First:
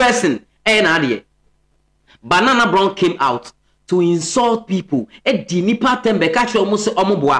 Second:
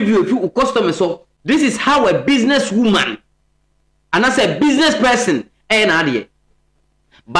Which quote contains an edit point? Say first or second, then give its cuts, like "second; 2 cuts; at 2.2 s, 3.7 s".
second; 1 cut; at 1.2 s